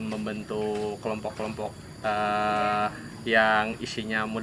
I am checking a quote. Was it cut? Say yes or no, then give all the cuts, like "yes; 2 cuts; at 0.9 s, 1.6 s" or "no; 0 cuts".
no; 0 cuts